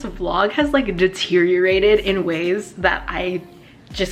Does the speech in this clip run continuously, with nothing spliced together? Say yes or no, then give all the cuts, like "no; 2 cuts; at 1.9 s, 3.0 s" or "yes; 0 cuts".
yes; 0 cuts